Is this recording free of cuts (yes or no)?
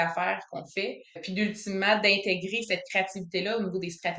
no